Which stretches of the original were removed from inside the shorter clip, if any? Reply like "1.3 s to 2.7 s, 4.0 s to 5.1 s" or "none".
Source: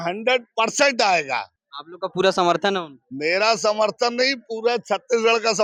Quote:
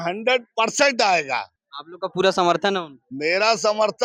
none